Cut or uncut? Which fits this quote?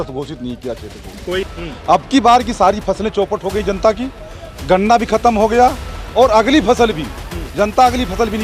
cut